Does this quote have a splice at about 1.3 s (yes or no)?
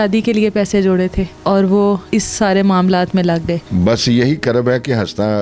yes